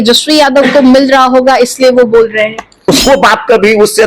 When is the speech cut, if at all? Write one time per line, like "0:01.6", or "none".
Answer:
0:02.9